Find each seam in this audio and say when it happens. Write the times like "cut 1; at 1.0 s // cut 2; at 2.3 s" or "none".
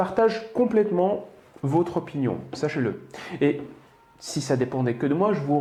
none